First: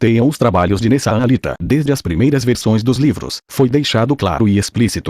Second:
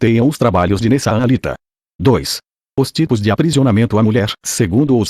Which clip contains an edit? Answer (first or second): second